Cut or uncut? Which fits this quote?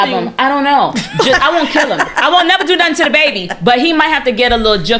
uncut